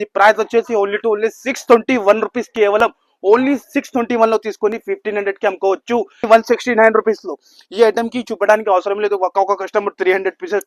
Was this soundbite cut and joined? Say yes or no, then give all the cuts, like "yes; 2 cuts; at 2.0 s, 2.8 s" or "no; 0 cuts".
yes; 1 cut; at 6.2 s